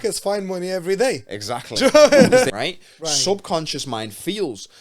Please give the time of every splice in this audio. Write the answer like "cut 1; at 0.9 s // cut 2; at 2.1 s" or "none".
cut 1; at 2.5 s